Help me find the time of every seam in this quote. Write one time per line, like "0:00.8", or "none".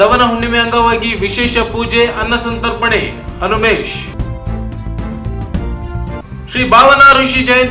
0:05.2
0:06.2